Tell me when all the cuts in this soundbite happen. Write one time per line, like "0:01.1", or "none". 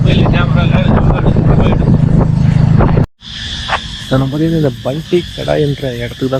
none